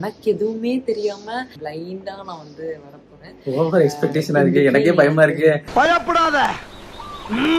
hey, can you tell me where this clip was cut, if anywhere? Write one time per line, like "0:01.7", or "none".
0:01.6